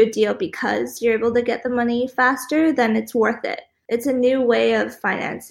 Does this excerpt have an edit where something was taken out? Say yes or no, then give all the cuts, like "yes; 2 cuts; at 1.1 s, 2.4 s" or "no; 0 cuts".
no; 0 cuts